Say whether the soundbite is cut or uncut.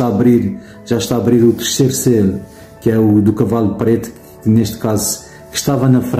uncut